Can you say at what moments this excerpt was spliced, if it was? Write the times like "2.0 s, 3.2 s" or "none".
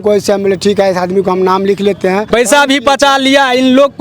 2.3 s